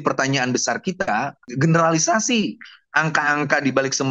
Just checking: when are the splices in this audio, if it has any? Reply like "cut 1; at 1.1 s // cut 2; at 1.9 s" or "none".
cut 1; at 1.5 s